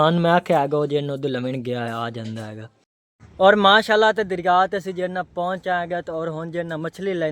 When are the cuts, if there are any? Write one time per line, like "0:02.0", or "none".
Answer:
0:03.0